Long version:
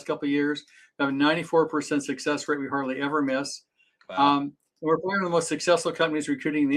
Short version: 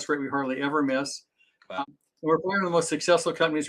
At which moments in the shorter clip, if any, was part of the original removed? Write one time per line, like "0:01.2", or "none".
0:01.8